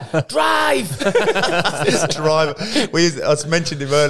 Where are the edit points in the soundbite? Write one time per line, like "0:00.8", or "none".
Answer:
none